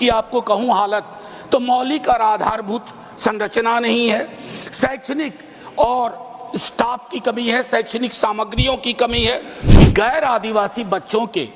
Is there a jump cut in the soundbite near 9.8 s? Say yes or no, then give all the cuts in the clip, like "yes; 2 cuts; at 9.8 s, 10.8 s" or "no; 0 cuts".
yes; 1 cut; at 9.8 s